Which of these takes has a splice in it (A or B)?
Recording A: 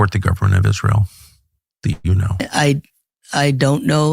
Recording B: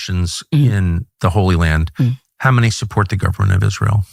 A